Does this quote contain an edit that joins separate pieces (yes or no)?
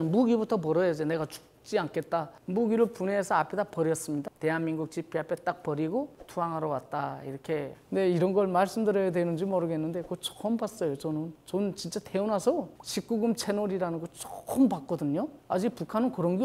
yes